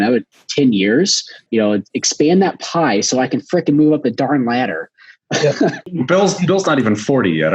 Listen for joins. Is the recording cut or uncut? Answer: cut